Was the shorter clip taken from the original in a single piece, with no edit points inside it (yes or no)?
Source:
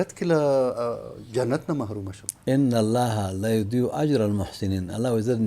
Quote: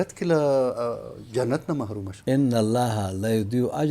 no